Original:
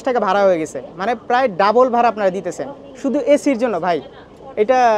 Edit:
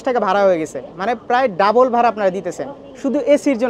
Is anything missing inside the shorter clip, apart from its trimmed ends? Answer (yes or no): no